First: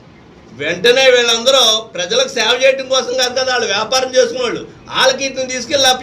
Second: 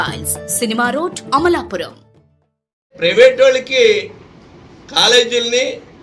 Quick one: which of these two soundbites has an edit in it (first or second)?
second